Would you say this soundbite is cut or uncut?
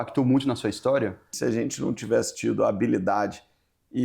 cut